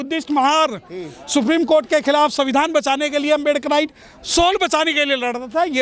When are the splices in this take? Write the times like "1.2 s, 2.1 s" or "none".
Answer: none